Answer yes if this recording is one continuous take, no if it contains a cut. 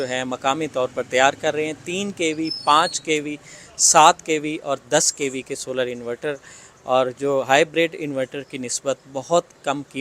yes